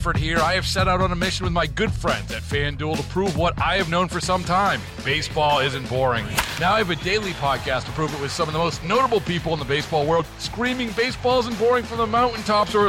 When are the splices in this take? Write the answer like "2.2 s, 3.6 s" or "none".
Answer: none